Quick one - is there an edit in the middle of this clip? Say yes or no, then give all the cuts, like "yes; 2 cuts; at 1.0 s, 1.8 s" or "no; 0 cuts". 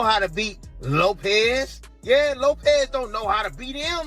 yes; 1 cut; at 3.0 s